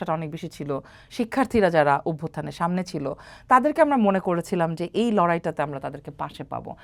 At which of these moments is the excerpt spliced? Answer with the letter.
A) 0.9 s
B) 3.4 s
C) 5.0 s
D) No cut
D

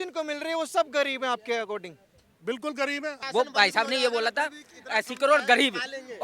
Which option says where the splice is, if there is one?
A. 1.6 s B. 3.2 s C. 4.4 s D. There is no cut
B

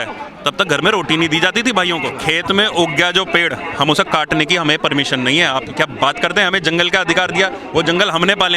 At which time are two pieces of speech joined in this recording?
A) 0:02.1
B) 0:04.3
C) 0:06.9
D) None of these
A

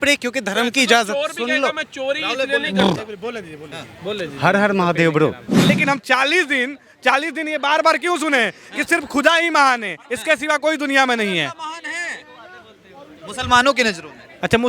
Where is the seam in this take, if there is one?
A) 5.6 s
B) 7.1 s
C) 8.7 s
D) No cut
A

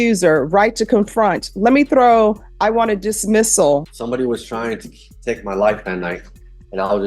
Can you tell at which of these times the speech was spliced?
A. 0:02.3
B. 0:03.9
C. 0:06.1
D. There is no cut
B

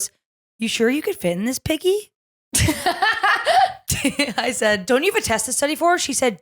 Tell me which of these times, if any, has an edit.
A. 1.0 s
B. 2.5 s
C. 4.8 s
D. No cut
C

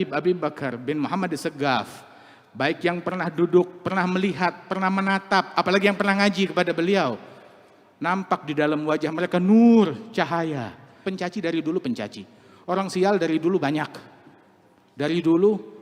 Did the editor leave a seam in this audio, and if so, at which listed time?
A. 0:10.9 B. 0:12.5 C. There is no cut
A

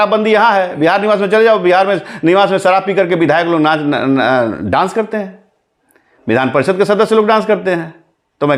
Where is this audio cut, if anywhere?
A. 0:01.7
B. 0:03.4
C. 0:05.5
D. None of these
D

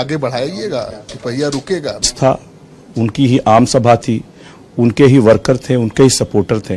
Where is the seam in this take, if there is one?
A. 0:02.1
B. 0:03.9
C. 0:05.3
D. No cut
A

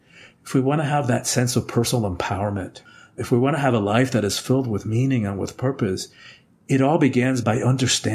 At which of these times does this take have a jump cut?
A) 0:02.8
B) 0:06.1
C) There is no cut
A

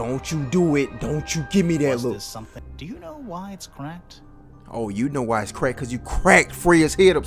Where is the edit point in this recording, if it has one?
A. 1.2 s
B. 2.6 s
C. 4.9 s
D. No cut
B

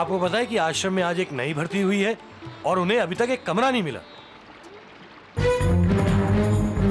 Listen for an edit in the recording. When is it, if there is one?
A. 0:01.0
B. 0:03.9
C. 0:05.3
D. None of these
C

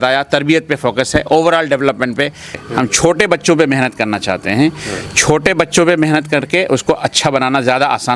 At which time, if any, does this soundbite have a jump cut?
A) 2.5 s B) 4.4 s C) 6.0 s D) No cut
A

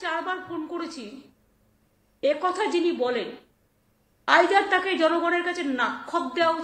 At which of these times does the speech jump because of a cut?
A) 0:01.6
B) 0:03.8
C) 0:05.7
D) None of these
D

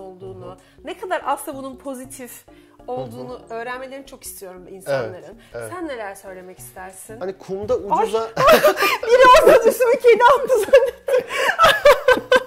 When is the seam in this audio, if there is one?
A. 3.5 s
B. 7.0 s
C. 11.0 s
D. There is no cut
B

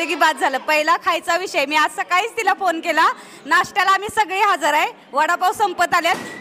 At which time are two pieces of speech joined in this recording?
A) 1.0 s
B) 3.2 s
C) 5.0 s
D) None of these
D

